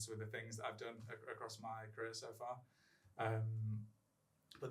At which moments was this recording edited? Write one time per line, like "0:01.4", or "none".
none